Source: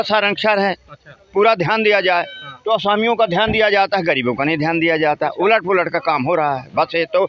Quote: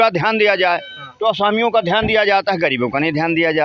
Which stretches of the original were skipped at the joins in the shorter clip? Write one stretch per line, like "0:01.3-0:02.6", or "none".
none